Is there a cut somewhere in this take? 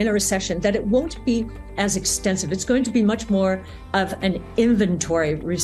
no; 0 cuts

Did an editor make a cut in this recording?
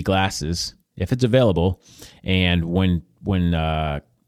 no; 0 cuts

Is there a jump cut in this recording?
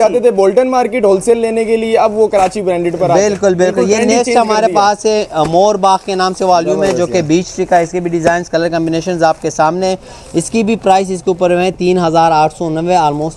no; 0 cuts

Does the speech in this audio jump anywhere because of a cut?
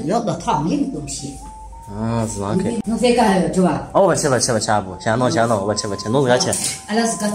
yes; 1 cut; at 2.8 s

